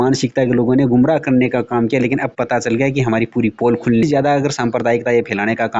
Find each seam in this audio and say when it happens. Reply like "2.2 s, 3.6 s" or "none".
4.0 s